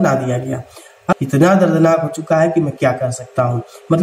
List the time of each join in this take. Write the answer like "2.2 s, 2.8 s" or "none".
0.9 s